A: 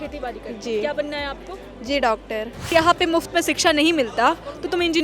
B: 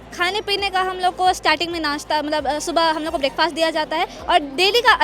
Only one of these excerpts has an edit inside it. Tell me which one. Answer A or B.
A